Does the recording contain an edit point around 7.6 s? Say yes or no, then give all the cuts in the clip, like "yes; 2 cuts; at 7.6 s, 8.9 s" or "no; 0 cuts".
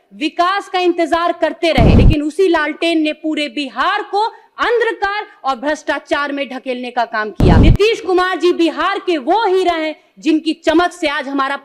yes; 2 cuts; at 2.0 s, 7.6 s